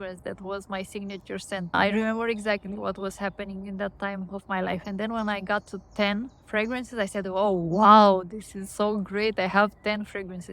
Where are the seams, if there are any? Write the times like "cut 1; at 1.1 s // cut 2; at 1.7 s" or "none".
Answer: cut 1; at 1.7 s